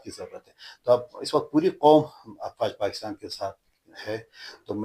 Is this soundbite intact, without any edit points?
yes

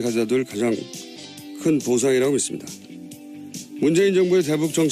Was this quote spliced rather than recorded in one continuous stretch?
yes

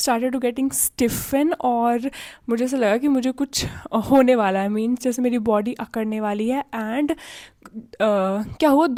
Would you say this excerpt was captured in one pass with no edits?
yes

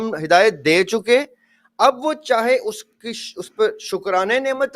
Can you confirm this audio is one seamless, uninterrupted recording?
yes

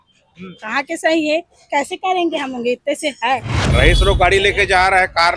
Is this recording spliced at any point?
yes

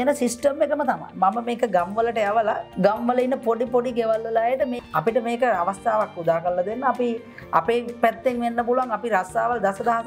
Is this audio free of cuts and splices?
no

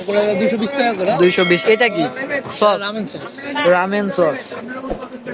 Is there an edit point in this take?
no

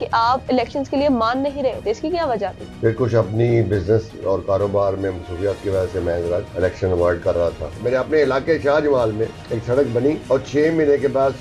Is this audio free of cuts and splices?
no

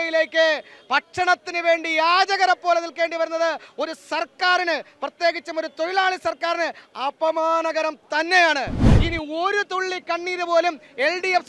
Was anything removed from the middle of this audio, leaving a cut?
yes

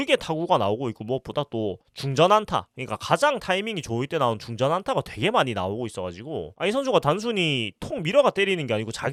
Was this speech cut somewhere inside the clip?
no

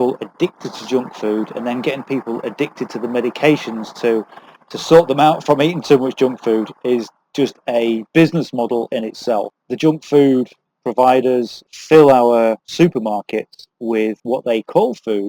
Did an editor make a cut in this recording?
yes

